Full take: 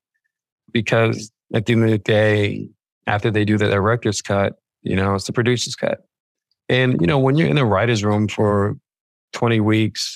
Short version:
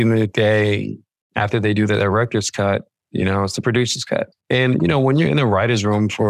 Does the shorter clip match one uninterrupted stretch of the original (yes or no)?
no